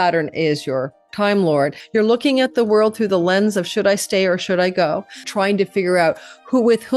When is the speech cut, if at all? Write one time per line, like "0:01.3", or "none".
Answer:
0:01.8
0:05.3